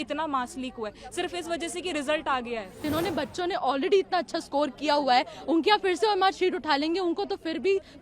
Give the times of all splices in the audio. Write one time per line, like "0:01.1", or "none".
0:02.8